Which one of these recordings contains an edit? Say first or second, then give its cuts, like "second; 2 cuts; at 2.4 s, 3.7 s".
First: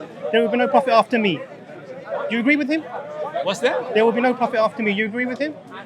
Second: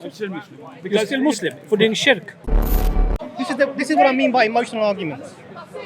second; 1 cut; at 2.9 s